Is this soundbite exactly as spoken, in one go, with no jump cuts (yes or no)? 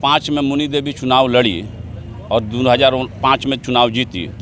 yes